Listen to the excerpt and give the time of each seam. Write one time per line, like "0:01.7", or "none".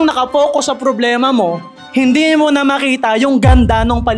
none